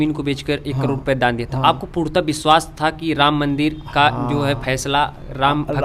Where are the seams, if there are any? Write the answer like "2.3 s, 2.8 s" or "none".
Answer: none